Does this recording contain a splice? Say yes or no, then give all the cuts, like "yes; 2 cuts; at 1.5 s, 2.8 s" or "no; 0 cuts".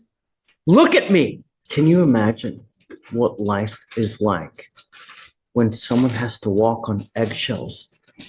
yes; 1 cut; at 1.6 s